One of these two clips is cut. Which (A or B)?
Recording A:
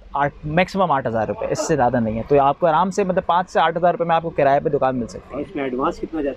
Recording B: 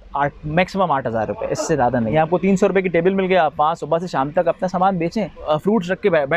B